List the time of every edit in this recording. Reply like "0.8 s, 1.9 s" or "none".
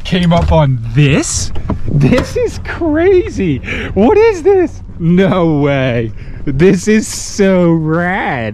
4.9 s